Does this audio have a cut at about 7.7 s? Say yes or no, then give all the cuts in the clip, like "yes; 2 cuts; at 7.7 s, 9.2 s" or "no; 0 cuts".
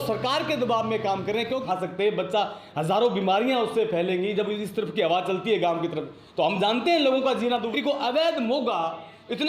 yes; 2 cuts; at 1.6 s, 7.7 s